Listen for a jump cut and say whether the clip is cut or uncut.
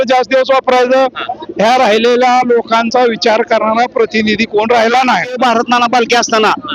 cut